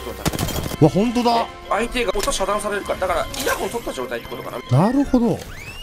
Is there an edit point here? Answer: yes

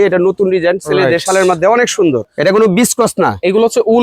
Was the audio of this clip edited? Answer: yes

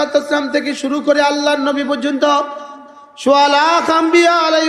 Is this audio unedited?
yes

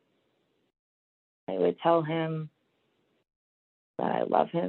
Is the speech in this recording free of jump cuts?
yes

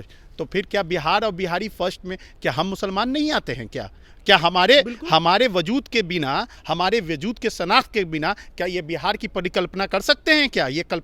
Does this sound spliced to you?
no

